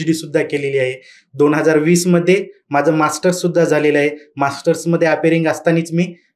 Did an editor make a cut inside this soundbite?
no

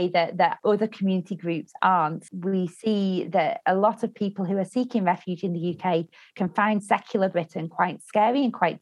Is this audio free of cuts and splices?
no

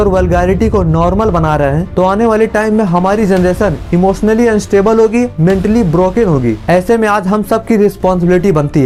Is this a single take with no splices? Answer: yes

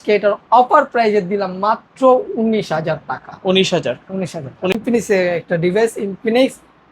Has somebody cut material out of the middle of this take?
yes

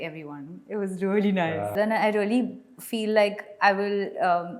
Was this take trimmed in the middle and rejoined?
yes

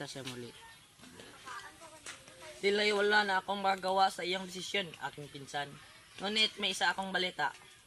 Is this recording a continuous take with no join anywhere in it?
yes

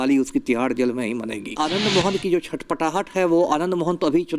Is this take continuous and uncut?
no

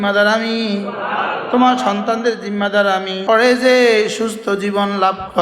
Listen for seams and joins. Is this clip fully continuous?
no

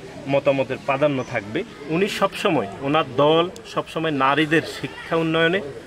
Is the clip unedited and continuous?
no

